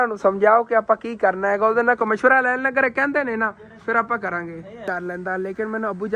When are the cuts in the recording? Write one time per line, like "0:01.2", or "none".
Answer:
0:04.9